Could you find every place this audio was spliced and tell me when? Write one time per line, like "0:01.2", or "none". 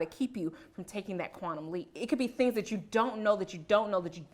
0:02.0